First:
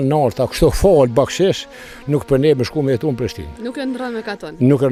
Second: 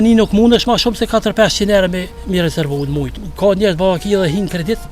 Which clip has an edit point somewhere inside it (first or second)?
second